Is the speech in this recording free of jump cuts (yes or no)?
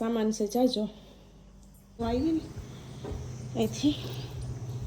no